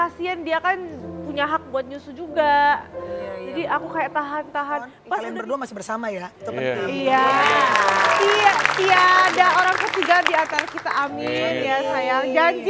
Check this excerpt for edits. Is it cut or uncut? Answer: cut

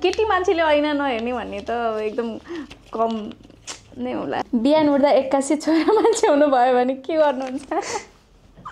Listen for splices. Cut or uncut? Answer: cut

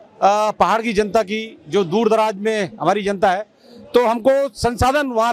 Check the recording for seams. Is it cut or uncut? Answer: uncut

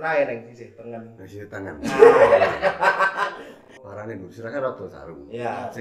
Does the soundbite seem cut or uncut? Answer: cut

